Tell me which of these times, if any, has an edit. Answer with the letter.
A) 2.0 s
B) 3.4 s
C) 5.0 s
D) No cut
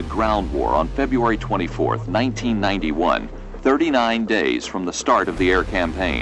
D